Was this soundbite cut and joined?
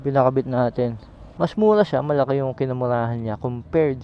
yes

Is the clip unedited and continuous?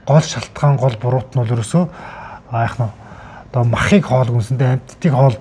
yes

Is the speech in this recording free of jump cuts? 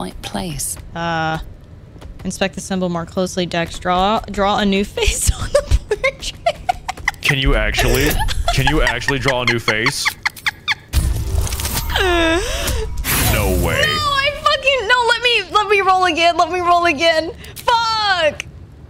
yes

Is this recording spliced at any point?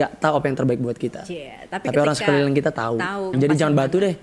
yes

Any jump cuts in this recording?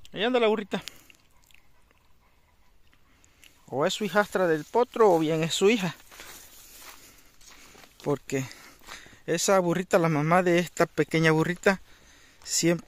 no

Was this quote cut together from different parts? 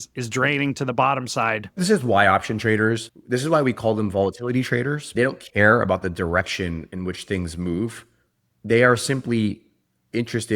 yes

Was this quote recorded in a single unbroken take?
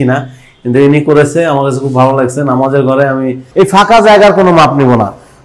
no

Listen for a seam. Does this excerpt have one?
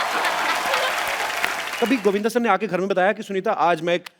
yes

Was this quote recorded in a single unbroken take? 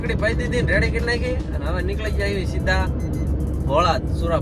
yes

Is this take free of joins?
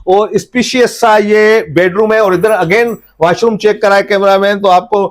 yes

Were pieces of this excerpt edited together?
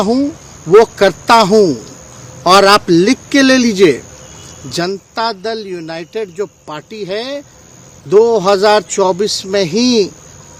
no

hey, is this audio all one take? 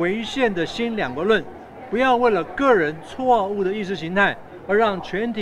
yes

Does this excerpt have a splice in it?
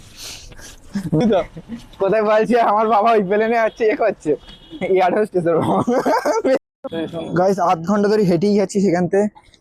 yes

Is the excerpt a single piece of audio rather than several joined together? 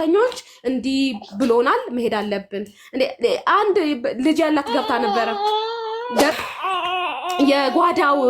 no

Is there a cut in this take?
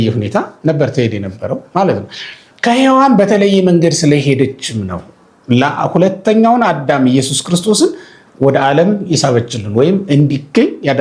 no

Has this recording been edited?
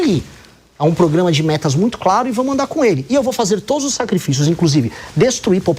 no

